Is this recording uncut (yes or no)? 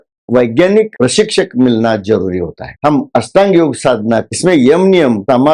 no